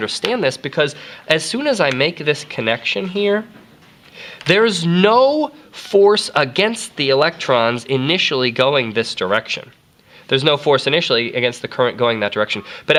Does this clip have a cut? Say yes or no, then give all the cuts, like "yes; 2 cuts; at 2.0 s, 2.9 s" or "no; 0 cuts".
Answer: no; 0 cuts